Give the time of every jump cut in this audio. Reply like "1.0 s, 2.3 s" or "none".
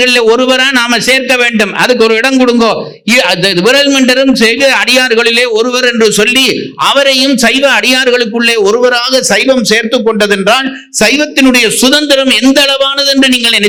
none

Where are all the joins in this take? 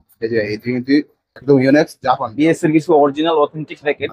2.3 s

